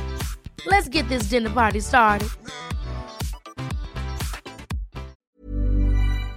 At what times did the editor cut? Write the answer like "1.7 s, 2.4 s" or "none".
5.2 s